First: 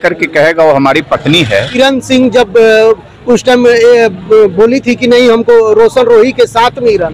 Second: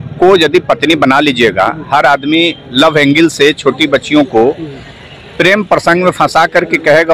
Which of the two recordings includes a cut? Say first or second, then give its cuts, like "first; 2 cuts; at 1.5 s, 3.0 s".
first; 1 cut; at 1.7 s